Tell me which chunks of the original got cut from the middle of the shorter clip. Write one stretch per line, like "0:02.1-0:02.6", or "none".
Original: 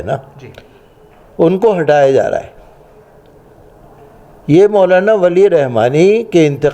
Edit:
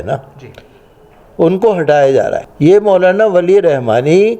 0:02.5-0:04.3